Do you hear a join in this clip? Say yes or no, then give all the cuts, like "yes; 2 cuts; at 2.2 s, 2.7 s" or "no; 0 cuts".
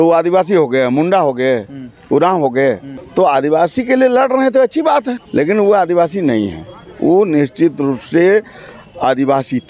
yes; 2 cuts; at 2.9 s, 5.2 s